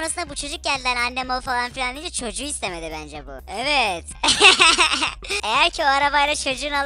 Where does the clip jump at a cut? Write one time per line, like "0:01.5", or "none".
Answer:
none